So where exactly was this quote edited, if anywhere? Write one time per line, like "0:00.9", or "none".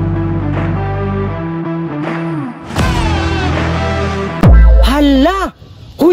none